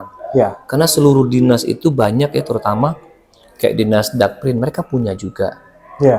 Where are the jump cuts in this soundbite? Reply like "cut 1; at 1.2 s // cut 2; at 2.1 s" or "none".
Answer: none